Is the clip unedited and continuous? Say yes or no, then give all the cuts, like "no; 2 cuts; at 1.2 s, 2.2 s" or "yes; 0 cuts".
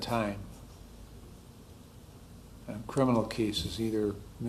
yes; 0 cuts